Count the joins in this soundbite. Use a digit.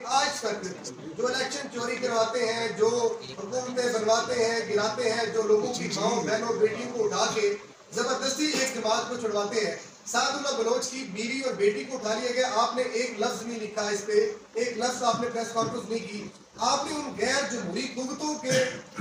0